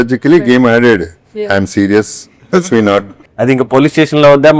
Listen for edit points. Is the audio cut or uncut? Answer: cut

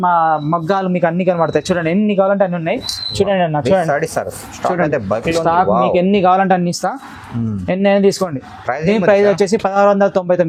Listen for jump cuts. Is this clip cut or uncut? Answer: uncut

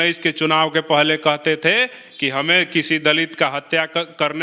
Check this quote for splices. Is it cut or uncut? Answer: uncut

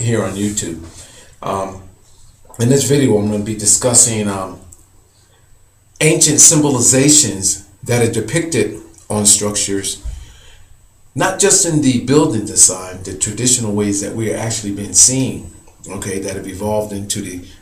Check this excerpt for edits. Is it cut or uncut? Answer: uncut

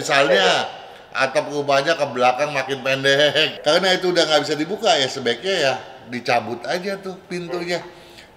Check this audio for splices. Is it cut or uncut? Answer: cut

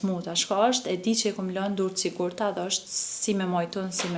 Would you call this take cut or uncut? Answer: uncut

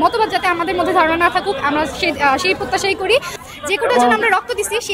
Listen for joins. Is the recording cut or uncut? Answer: cut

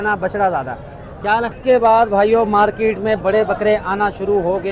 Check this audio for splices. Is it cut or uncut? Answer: cut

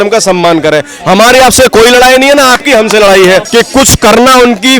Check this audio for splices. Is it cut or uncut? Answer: cut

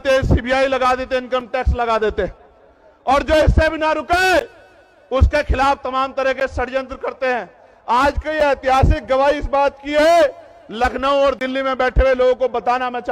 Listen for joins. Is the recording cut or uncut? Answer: uncut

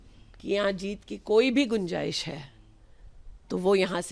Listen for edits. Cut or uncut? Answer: uncut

